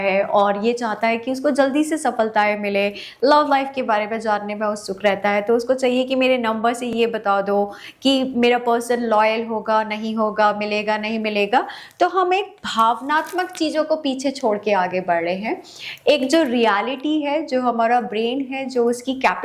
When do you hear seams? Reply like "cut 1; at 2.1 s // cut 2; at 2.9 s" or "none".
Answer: none